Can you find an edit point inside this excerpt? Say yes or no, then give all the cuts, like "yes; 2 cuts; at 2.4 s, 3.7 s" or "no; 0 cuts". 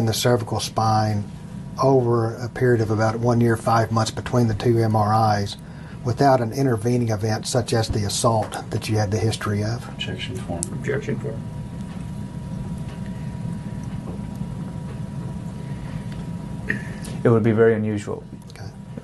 no; 0 cuts